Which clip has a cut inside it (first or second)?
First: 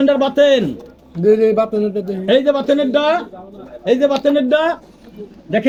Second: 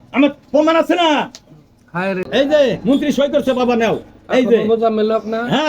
second